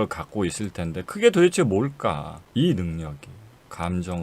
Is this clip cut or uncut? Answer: cut